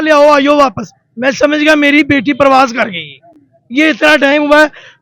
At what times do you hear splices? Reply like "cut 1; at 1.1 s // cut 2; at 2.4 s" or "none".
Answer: none